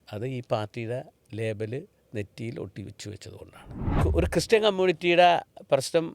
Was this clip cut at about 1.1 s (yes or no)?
no